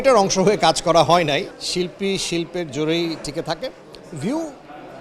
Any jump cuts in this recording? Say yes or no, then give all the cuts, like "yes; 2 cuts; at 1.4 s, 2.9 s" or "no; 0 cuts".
yes; 1 cut; at 1.6 s